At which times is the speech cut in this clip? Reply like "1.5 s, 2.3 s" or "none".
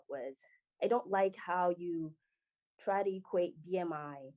none